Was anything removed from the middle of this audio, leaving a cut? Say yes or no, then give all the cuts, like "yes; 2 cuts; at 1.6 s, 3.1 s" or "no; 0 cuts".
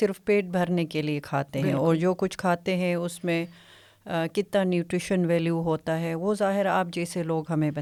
no; 0 cuts